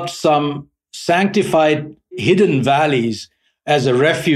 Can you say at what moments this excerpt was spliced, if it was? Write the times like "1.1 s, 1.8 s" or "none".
2.1 s